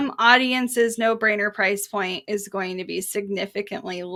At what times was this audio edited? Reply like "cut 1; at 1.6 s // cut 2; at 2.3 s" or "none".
none